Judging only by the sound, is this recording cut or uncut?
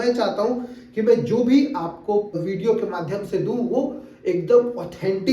cut